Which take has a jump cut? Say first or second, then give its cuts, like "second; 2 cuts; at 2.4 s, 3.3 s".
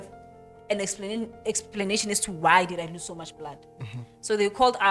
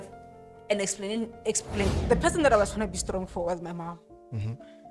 second; 1 cut; at 1.7 s